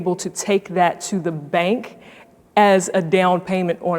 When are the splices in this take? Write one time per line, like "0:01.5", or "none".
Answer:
none